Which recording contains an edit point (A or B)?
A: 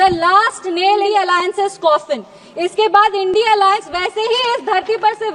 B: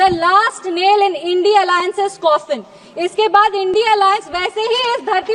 A